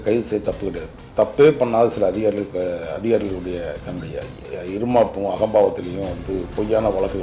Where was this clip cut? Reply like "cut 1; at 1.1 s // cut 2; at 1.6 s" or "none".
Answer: none